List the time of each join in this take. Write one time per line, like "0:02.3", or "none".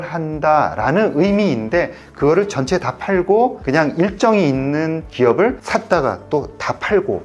none